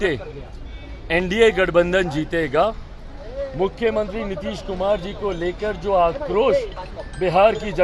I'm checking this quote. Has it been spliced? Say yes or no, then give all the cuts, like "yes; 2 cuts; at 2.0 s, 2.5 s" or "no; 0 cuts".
no; 0 cuts